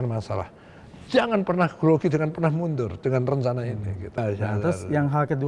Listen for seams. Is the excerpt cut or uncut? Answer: cut